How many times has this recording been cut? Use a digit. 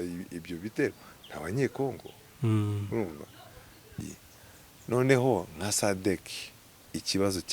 1